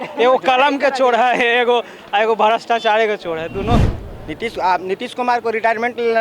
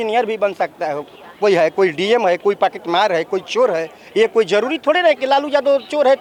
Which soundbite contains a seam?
first; 1 cut; at 3.9 s

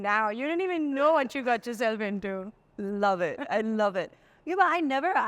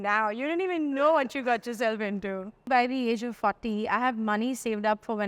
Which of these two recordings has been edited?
second; 1 cut; at 2.7 s

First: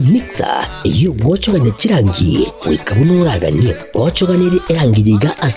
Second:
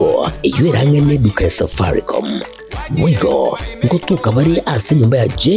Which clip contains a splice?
first; 1 cut; at 2.4 s

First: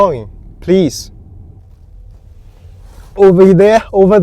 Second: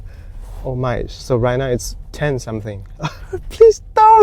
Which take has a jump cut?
first; 1 cut; at 1.6 s

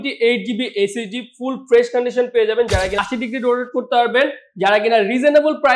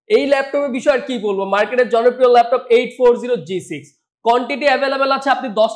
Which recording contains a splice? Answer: first; 1 cut; at 2.9 s

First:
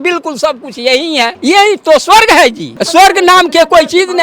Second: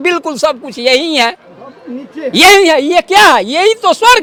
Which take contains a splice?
first; 2 cuts; at 1.3 s, 2.7 s

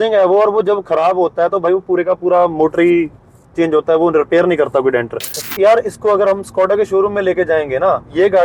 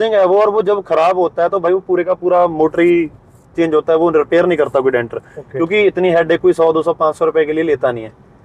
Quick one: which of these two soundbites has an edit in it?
first; 1 cut; at 5.4 s

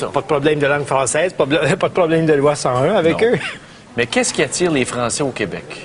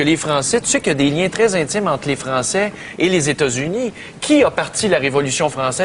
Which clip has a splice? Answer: second; 1 cut; at 3.5 s

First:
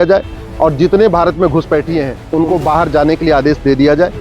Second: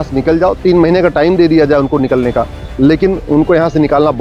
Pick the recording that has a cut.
first; 1 cut; at 2.2 s

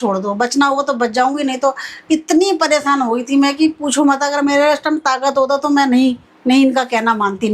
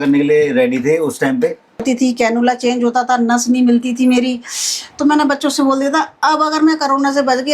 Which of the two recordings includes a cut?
second; 1 cut; at 1.8 s

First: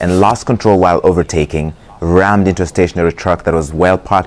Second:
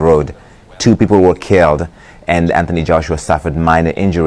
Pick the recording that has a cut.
second; 1 cut; at 1.0 s

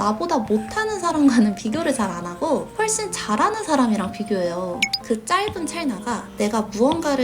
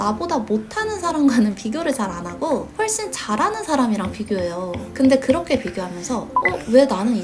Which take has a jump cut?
first; 1 cut; at 4.8 s

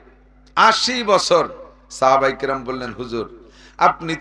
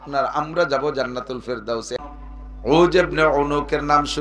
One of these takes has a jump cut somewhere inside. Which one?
second; 1 cut; at 2.0 s

